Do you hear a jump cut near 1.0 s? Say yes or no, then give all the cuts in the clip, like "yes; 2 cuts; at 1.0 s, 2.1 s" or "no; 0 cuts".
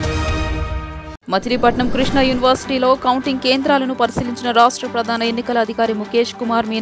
yes; 1 cut; at 1.0 s